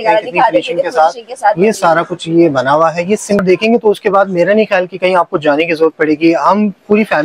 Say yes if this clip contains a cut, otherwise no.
yes